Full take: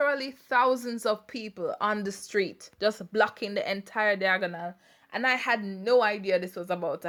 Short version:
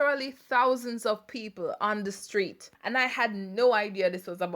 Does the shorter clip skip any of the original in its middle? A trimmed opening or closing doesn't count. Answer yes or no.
yes